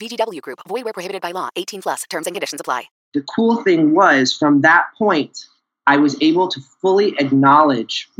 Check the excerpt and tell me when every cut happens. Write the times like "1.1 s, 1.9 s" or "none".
3.0 s